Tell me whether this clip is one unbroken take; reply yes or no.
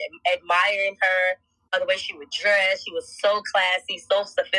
no